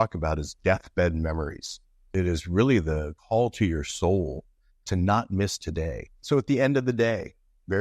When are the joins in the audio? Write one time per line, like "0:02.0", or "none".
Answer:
0:02.0
0:03.1
0:06.1